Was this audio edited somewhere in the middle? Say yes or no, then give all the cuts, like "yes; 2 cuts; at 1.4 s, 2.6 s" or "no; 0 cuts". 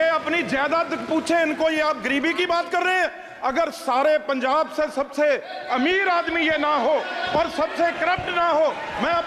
no; 0 cuts